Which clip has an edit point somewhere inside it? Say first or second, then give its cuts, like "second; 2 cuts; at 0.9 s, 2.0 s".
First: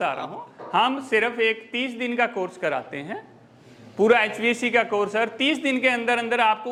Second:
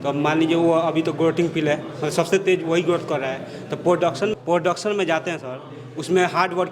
second; 1 cut; at 4.3 s